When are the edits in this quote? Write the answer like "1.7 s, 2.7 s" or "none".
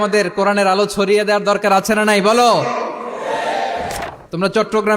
3.9 s